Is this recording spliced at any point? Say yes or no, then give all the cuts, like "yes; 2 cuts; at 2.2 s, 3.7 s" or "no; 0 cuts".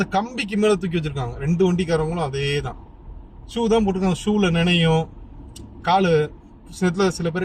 no; 0 cuts